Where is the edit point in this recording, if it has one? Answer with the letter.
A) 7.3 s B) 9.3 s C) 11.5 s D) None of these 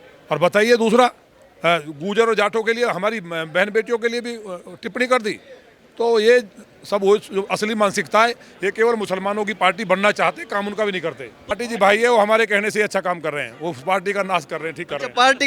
C